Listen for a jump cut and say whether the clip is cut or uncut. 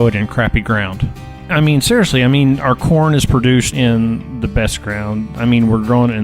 cut